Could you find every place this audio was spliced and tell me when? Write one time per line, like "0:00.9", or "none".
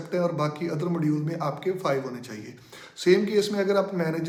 none